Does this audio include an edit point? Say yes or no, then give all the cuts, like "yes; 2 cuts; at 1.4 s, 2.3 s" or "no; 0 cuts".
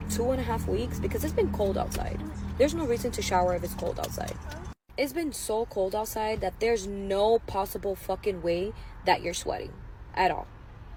no; 0 cuts